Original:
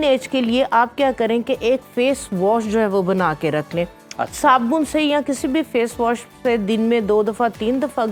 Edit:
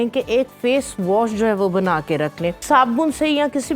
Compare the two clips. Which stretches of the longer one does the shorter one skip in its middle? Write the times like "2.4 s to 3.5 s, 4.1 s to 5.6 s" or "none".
3.9 s to 4.3 s